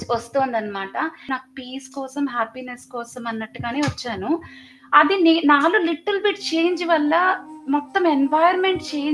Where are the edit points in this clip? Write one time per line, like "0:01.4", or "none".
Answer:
0:01.3

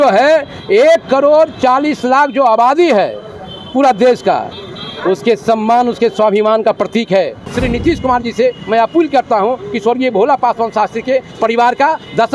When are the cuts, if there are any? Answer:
0:07.5

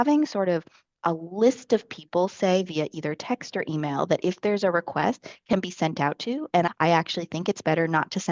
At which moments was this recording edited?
0:06.7

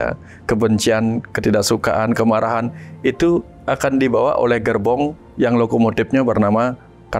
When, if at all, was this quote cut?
0:01.3

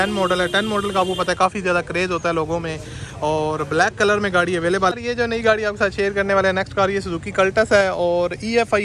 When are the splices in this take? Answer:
0:04.9

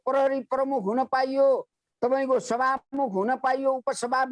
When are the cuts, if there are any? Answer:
none

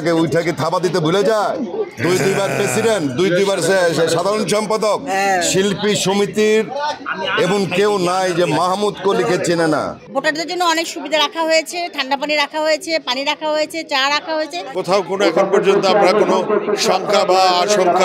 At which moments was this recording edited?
0:10.0
0:14.6

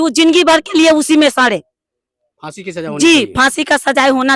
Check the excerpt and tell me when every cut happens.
none

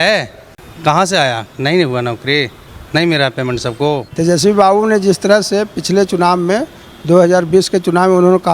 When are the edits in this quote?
0:04.1

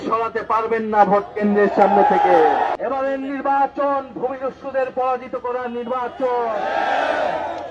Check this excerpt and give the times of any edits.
0:02.7

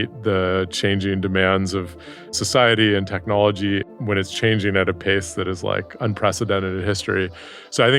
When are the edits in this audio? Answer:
0:02.4
0:03.9

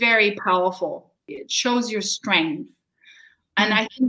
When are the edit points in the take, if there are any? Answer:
0:01.3

